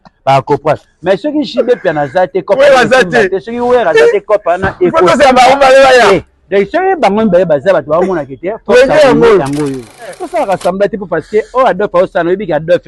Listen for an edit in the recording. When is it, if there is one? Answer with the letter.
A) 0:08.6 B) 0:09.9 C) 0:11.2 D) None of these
B